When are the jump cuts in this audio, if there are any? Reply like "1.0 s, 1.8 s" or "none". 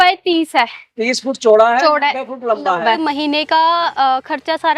3.0 s

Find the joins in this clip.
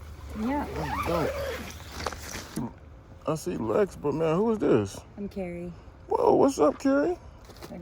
2.6 s

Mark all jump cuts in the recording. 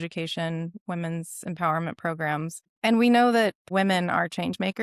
2.7 s, 3.6 s

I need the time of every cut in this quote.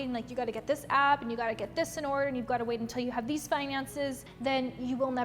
4.3 s

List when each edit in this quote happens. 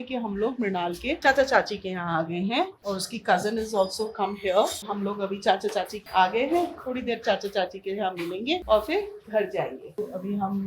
none

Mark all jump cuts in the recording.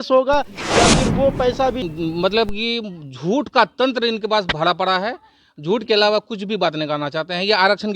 1.8 s

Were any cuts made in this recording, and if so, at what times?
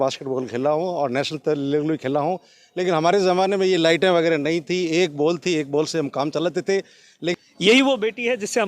7.3 s

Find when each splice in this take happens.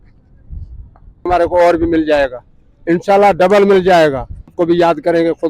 1.3 s, 4.6 s

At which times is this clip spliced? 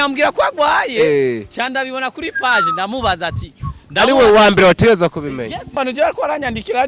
5.8 s

